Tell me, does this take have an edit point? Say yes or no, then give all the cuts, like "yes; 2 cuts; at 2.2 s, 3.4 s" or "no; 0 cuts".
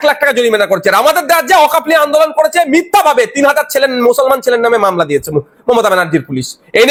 no; 0 cuts